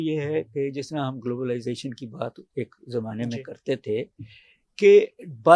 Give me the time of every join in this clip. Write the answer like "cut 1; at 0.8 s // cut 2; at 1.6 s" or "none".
none

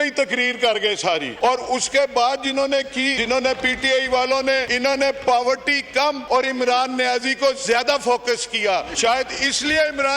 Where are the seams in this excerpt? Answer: cut 1; at 1.3 s // cut 2; at 3.2 s // cut 3; at 4.7 s // cut 4; at 6.2 s // cut 5; at 8.9 s

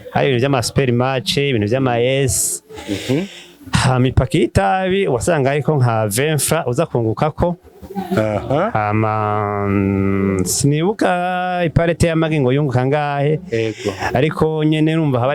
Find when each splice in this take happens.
none

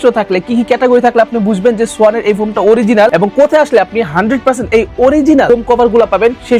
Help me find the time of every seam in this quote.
none

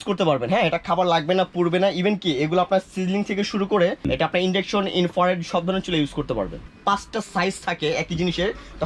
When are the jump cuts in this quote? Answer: cut 1; at 4.1 s // cut 2; at 6.6 s

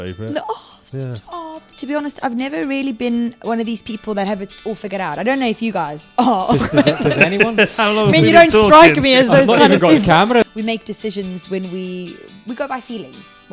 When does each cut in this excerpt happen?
cut 1; at 1.7 s // cut 2; at 10.4 s

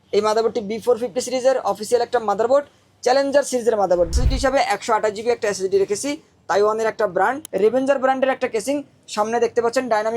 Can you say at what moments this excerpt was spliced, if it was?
cut 1; at 4.1 s // cut 2; at 7.4 s

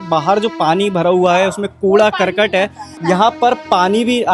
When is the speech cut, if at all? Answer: cut 1; at 2.9 s

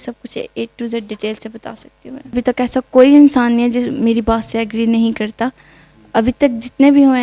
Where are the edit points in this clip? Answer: cut 1; at 2.4 s

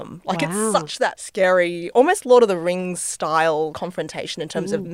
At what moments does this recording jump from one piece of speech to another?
cut 1; at 1.2 s // cut 2; at 3.7 s

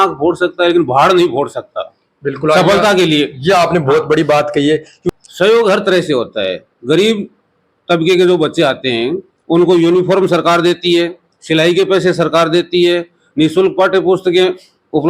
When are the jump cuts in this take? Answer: none

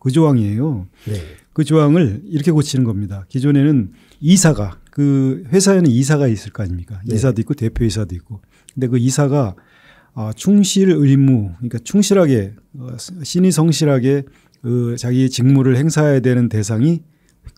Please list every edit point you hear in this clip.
none

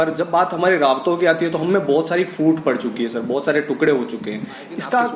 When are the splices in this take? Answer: none

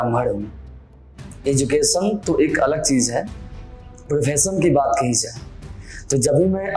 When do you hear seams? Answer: none

